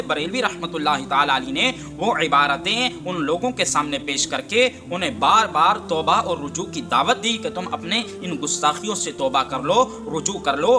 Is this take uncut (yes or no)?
yes